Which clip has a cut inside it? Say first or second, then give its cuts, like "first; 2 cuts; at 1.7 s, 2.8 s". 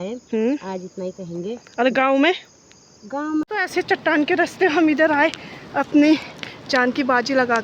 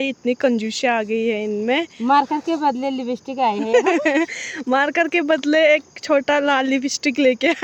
first; 1 cut; at 3.5 s